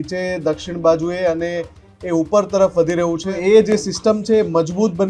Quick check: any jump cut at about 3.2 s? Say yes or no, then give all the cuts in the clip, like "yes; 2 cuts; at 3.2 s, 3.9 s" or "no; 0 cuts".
yes; 1 cut; at 3.2 s